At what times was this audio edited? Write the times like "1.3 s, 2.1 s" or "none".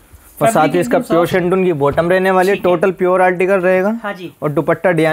none